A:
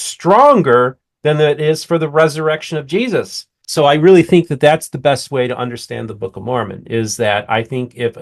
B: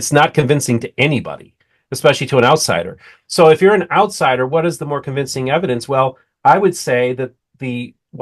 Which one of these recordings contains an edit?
A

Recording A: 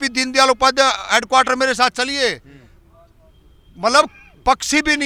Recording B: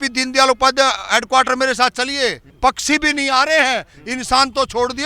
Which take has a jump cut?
B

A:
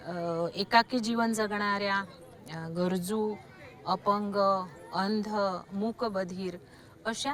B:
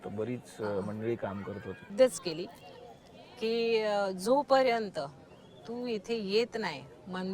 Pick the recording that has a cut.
B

